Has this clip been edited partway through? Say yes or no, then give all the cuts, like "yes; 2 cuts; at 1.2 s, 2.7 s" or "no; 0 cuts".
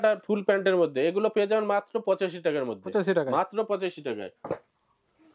no; 0 cuts